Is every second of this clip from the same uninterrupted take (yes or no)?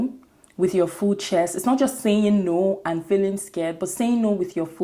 yes